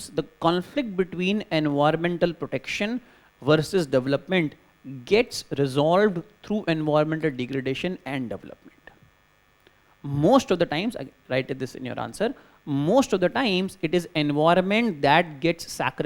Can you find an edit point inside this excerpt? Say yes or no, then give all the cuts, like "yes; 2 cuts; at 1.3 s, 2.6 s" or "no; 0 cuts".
no; 0 cuts